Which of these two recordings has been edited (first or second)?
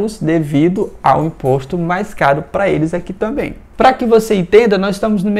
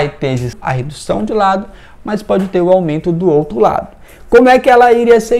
first